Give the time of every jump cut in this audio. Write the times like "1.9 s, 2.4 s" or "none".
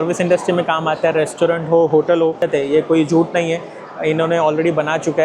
2.5 s